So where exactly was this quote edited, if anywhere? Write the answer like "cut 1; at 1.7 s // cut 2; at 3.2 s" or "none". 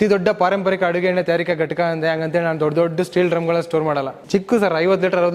cut 1; at 4.2 s